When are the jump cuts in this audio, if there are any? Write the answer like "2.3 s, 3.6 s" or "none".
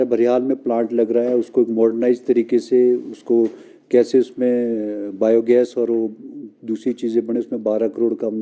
none